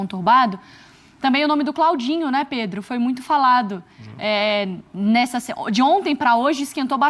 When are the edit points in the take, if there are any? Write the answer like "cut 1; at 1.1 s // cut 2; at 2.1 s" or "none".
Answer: none